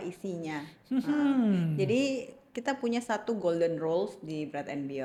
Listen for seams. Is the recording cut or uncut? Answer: uncut